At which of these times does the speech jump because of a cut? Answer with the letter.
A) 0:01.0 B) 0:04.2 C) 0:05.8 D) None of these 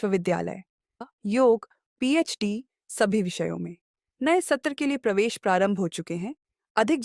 A